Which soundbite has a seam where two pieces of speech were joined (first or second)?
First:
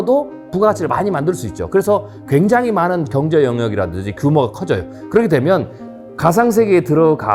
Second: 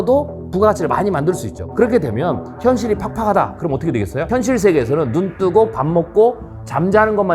second